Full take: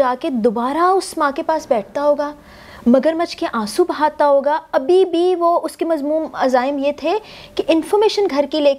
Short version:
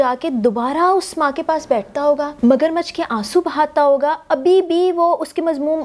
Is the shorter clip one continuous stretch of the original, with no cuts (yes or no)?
no